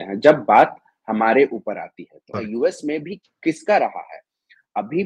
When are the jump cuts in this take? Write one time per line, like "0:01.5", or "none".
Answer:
0:02.2

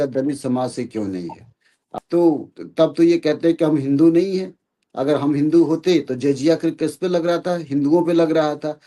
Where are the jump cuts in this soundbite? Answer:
0:01.8

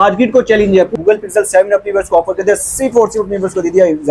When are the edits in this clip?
0:00.9

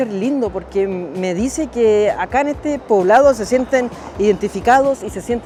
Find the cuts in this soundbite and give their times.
none

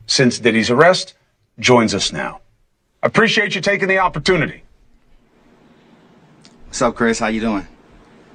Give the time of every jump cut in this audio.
none

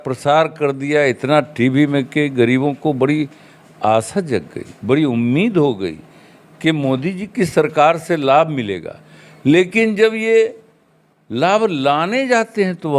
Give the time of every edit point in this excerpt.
none

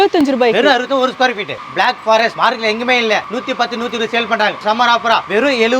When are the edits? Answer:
0:01.6
0:04.6

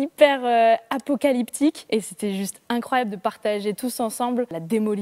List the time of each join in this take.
none

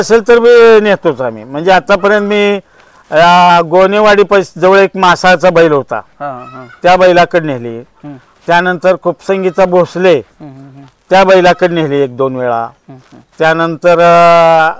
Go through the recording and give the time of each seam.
none

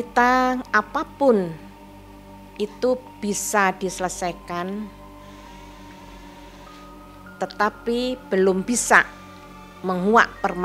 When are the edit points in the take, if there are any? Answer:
none

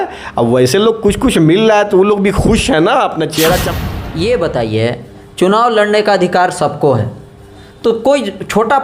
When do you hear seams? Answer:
0:03.6

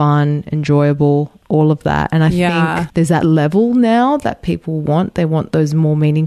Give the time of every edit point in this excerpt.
0:01.4
0:02.8

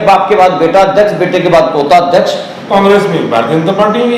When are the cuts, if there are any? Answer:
0:02.7

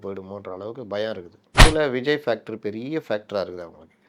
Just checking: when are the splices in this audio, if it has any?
0:01.6

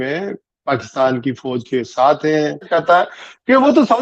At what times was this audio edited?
0:02.7

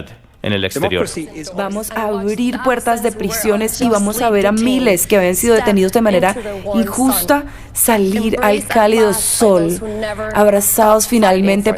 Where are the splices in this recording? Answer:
0:01.4

